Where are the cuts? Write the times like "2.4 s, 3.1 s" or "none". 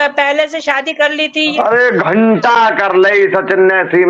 1.5 s